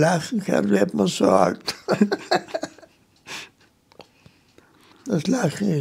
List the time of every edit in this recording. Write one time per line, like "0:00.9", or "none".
0:04.9